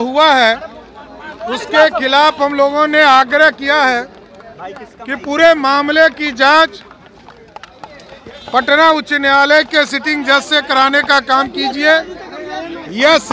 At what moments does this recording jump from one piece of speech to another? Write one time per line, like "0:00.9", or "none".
none